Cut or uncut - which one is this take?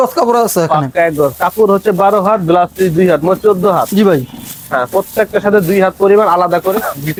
uncut